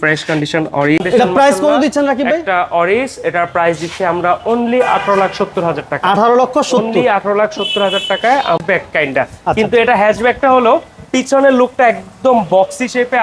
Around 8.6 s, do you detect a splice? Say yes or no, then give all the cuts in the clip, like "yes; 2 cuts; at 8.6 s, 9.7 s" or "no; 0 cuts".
yes; 2 cuts; at 1.0 s, 8.6 s